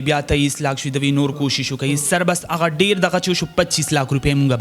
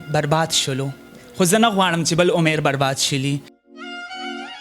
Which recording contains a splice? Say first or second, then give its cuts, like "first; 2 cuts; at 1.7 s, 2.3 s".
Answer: second; 1 cut; at 3.6 s